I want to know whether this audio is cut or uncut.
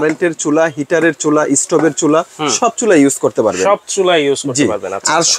uncut